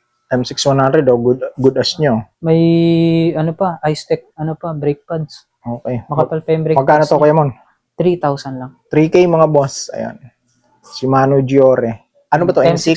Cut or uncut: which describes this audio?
uncut